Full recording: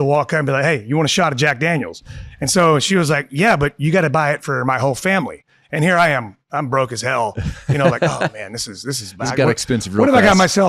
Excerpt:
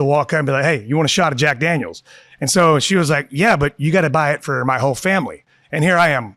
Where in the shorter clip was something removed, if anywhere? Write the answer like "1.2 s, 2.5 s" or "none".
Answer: none